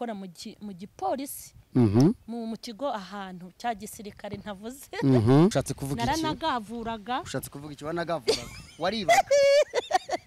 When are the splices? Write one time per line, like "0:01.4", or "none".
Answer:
0:05.5